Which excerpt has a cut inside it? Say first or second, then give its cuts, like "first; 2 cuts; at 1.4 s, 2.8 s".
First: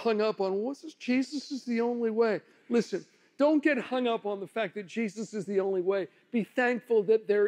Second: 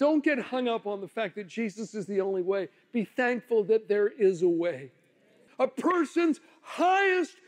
second; 1 cut; at 5.4 s